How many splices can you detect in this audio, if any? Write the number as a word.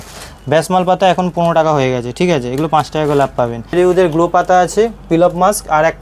one